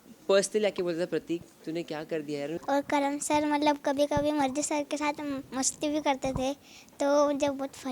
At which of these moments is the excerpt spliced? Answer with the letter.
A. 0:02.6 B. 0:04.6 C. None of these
A